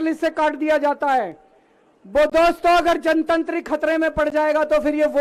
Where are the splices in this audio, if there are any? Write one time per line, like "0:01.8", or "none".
none